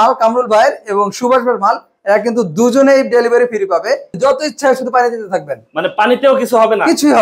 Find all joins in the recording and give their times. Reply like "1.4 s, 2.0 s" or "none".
4.1 s